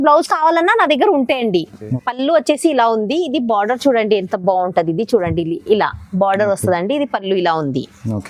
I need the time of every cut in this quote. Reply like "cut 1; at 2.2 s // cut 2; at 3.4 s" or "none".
cut 1; at 1.9 s